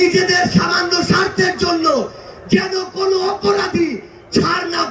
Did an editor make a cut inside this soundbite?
no; 0 cuts

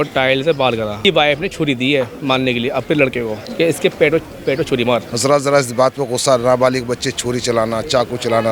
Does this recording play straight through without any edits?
no; 3 cuts; at 1.0 s, 3.4 s, 5.1 s

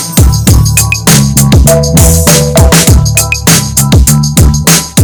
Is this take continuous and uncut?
yes; 0 cuts

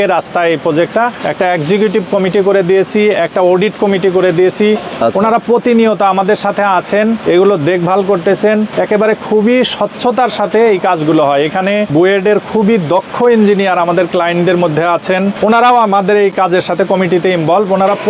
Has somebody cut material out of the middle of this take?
yes; 5 cuts; at 1.2 s, 7.2 s, 8.7 s, 11.9 s, 15.4 s

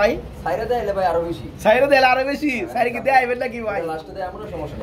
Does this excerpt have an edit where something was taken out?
no; 0 cuts

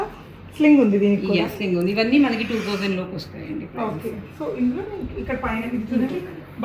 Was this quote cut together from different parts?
no; 0 cuts

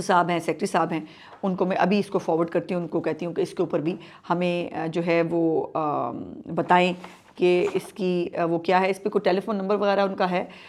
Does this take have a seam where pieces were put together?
no; 0 cuts

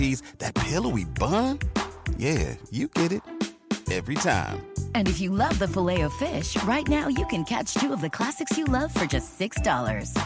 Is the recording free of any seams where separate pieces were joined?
yes; 0 cuts

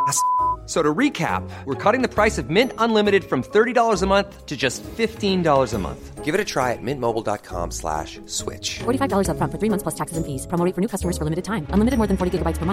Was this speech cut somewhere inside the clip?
no; 0 cuts

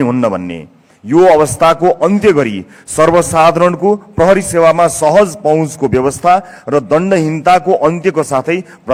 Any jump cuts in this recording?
no; 0 cuts

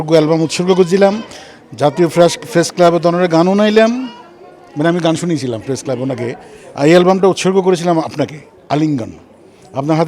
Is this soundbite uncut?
yes; 0 cuts

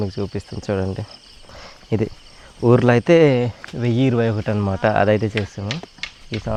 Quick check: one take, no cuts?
yes; 0 cuts

